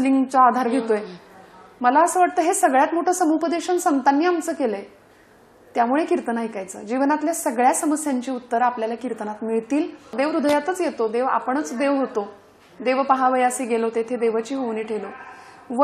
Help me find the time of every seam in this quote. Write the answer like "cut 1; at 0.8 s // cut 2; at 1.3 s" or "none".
cut 1; at 10.1 s

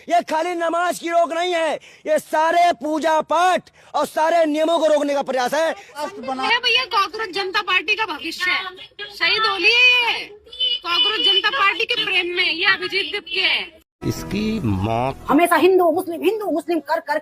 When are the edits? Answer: cut 1; at 6.4 s // cut 2; at 15.2 s

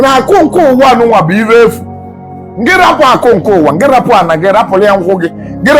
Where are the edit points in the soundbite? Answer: none

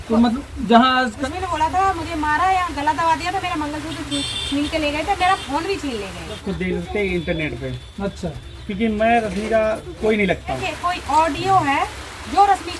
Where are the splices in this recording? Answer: cut 1; at 1.2 s // cut 2; at 6.4 s // cut 3; at 10.7 s

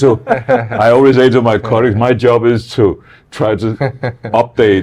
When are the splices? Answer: none

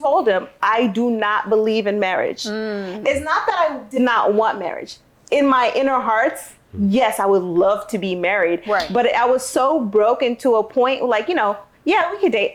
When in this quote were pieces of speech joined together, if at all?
none

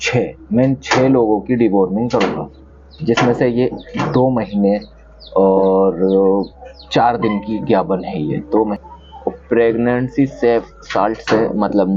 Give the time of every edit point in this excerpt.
cut 1; at 8.8 s

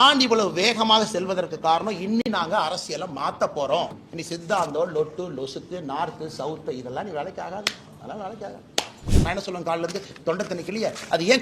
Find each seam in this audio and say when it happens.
cut 1; at 4.1 s // cut 2; at 9.1 s

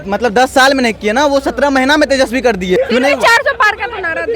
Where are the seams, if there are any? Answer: cut 1; at 2.8 s

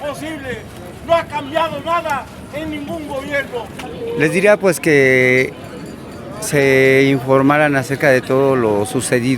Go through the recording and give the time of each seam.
cut 1; at 3.9 s

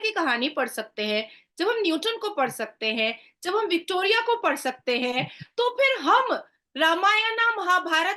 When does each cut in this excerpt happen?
none

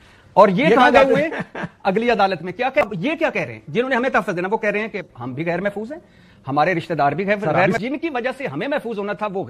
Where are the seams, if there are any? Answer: cut 1; at 2.8 s // cut 2; at 7.8 s

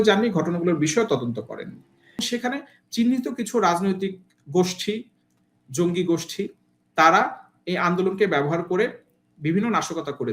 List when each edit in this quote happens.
cut 1; at 2.2 s

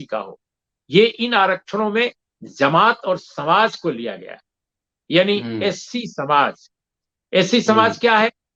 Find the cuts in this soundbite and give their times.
none

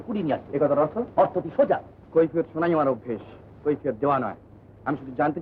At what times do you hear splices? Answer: cut 1; at 1.9 s

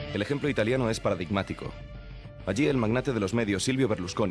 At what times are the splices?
cut 1; at 2.4 s

